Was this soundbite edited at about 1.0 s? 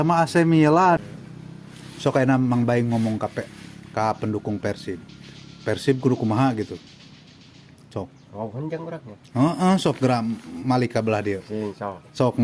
yes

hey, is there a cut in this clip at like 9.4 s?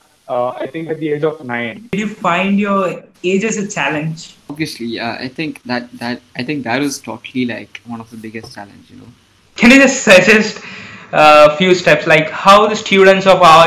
yes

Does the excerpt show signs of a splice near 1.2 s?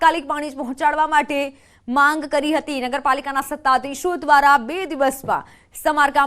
no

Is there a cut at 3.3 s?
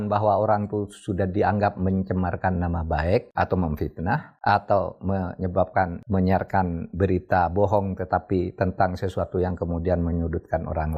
yes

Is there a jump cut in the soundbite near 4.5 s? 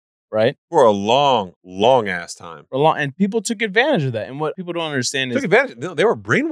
yes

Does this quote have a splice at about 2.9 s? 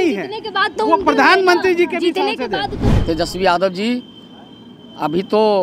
yes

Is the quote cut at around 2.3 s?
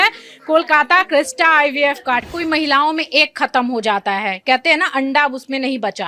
yes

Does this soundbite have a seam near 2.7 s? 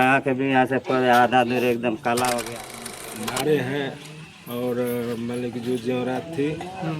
yes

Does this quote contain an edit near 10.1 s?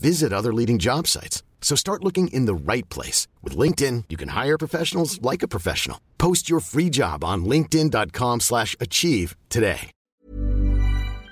yes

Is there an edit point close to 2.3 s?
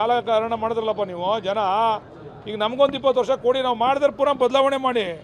no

